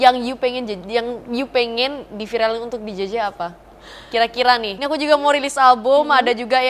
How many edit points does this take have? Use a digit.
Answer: 1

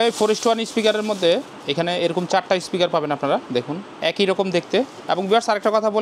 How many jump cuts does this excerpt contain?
2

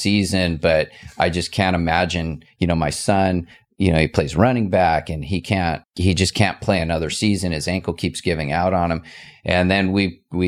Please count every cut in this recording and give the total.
1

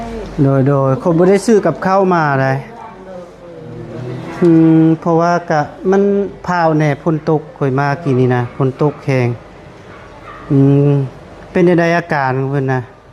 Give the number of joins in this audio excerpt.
0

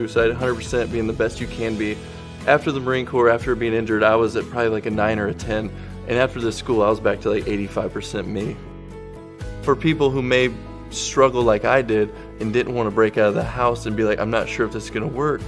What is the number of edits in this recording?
1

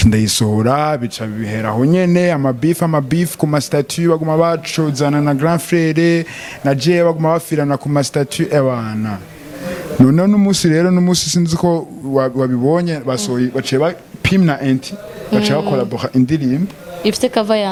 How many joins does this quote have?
0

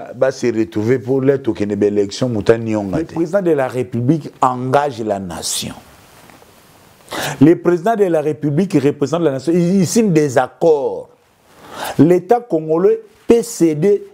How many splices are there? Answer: 1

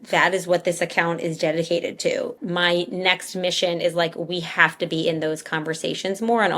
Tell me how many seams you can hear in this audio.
1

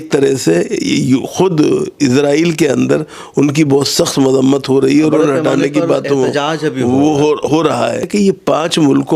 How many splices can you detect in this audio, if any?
1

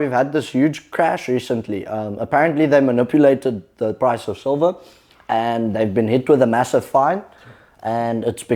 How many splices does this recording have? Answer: 0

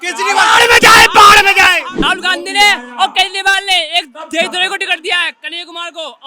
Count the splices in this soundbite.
1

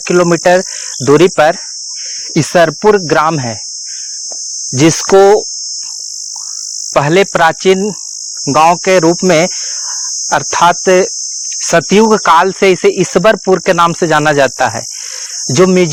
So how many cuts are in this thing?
0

